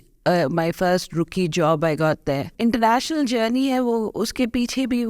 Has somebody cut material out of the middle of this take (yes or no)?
yes